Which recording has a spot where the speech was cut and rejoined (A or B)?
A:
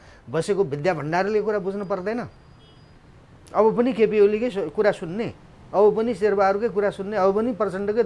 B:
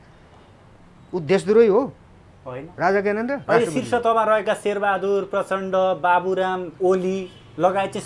B